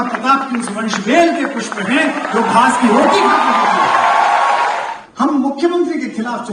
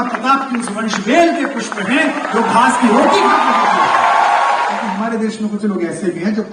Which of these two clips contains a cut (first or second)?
first